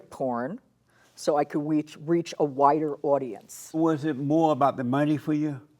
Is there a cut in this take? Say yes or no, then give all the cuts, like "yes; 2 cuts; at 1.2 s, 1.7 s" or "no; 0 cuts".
yes; 1 cut; at 3.8 s